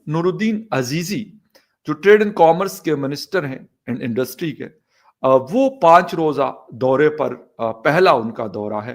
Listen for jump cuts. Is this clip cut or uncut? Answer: uncut